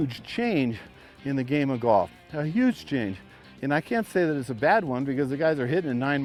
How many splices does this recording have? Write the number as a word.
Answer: zero